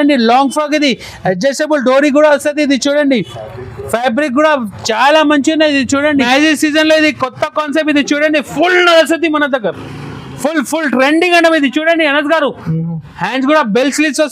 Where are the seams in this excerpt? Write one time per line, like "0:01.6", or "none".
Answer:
0:06.3